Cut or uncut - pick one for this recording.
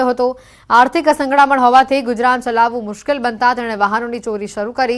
cut